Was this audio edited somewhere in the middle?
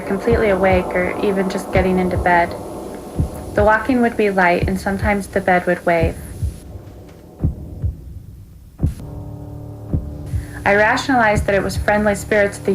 yes; 1 cut; at 9.0 s

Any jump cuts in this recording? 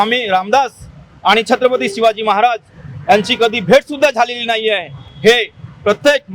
no; 0 cuts

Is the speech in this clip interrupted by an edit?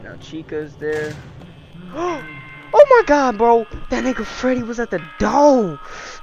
no; 0 cuts

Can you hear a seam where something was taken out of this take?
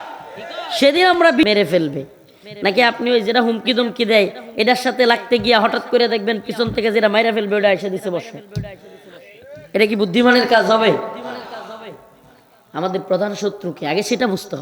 yes; 1 cut; at 1.4 s

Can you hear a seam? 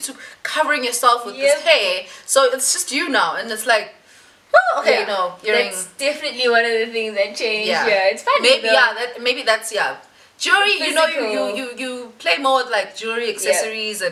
no; 0 cuts

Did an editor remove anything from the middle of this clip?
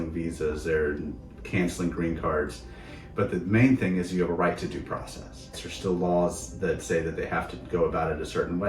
yes; 1 cut; at 5.7 s

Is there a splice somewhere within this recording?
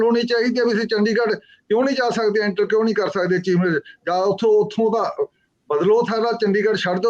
no; 0 cuts

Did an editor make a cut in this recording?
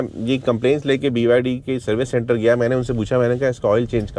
no; 0 cuts

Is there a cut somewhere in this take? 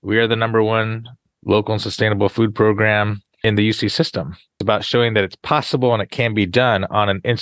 yes; 3 cuts; at 1.2 s, 3.4 s, 4.6 s

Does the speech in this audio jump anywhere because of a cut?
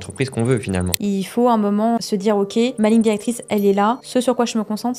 yes; 3 cuts; at 0.9 s, 2.6 s, 4.0 s

